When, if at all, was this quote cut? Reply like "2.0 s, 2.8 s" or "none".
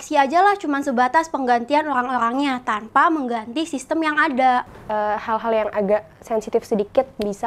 4.8 s